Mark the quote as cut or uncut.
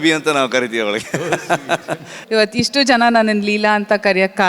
cut